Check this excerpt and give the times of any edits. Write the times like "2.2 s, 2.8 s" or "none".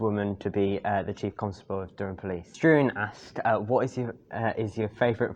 2.5 s